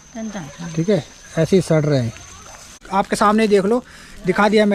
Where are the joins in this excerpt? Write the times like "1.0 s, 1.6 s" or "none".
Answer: 2.8 s

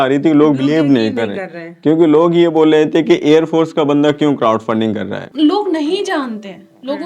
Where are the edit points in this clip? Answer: 5.2 s

